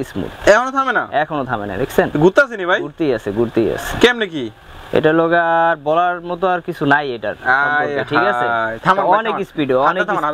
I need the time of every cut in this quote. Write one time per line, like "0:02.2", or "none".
none